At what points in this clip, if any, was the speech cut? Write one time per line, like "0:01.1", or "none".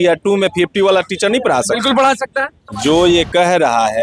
0:02.7

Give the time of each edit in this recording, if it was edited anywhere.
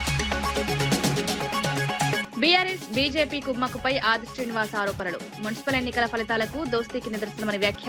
0:02.2

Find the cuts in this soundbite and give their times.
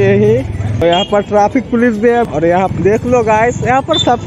0:00.8
0:02.7

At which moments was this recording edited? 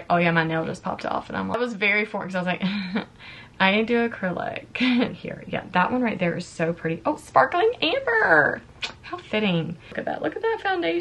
0:01.5
0:05.2
0:10.0

